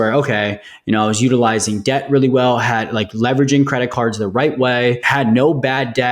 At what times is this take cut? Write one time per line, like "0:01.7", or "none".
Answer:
0:05.0